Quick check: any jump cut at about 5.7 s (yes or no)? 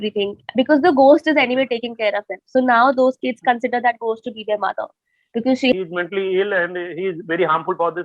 yes